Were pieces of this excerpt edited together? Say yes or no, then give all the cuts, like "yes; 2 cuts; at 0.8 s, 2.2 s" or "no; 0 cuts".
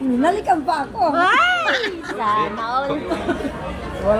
yes; 1 cut; at 3.1 s